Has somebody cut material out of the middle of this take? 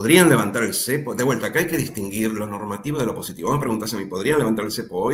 no; 0 cuts

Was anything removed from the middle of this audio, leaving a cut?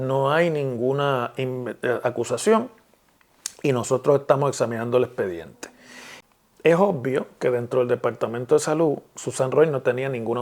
yes; 1 cut; at 6.1 s

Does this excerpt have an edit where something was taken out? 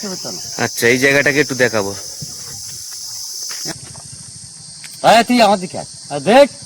yes; 1 cut; at 3.7 s

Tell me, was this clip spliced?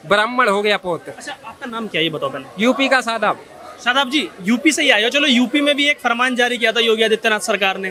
no; 0 cuts

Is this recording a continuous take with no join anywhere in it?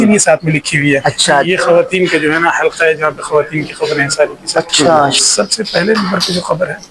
no; 2 cuts; at 1.5 s, 5.2 s

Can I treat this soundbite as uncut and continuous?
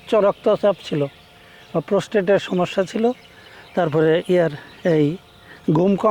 yes; 0 cuts

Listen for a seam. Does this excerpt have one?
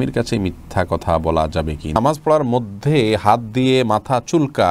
yes; 1 cut; at 2.0 s

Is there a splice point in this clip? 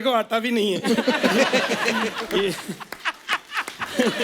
no; 0 cuts

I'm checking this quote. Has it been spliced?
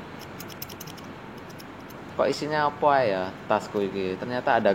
no; 0 cuts

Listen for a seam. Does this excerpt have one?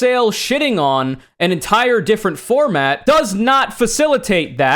no; 0 cuts

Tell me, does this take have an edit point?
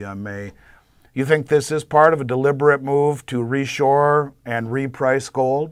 no; 0 cuts

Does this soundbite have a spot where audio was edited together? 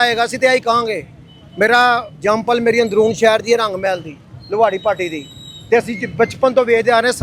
no; 0 cuts

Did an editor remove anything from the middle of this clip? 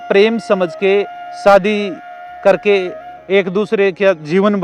no; 0 cuts

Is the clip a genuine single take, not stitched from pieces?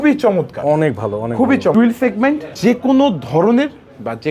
no; 2 cuts; at 1.7 s, 2.5 s

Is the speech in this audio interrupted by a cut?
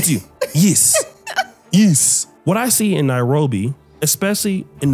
yes; 1 cut; at 2.3 s

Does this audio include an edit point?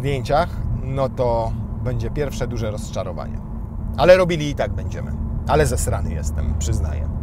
no; 0 cuts

